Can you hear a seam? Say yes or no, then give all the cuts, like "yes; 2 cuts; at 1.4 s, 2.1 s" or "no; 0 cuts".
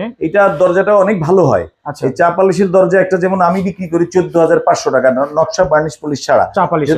no; 0 cuts